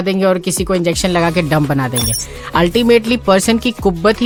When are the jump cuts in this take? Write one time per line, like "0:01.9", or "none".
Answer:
none